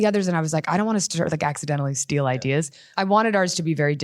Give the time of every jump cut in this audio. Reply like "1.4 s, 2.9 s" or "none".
2.8 s